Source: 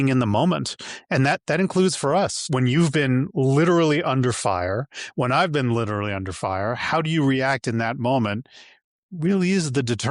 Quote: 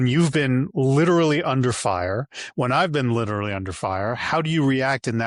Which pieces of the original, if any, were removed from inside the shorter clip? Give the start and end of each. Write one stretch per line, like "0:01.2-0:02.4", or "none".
none